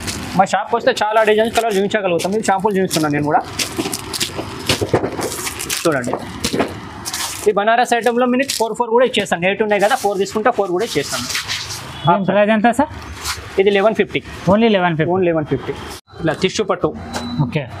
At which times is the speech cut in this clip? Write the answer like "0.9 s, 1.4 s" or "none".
none